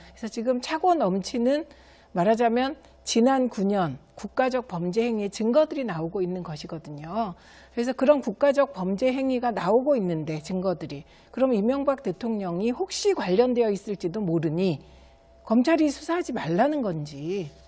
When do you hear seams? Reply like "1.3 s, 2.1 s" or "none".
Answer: 8.1 s